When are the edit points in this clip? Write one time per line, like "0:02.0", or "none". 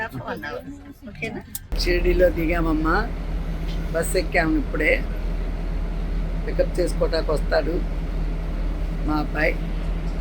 0:01.7

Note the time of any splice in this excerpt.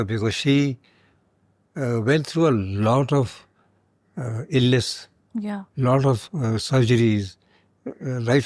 none

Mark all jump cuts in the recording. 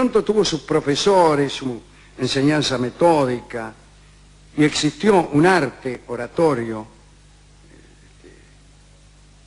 0:06.0

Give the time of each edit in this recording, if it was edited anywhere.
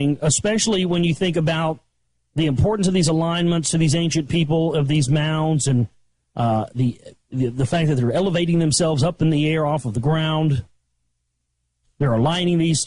0:04.3

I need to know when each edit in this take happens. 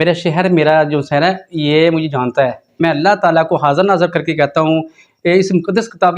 0:02.8

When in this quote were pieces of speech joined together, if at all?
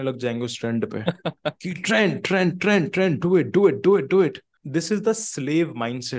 0:04.5

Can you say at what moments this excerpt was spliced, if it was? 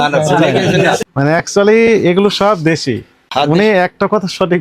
0:01.0
0:03.1

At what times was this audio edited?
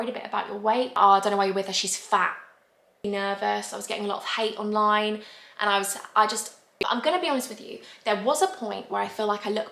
0:00.9
0:03.1
0:06.8

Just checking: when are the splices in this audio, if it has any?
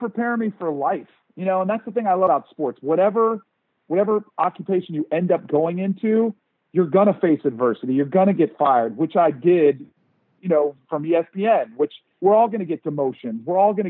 0:02.3

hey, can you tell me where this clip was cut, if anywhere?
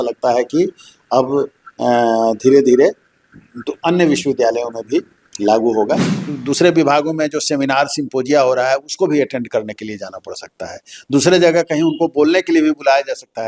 0:06.0

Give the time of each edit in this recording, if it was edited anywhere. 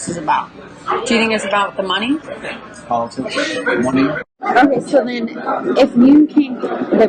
0:02.3
0:04.4

